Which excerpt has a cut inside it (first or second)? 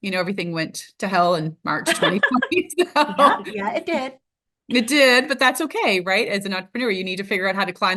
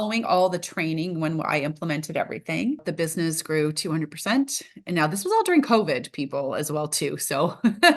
second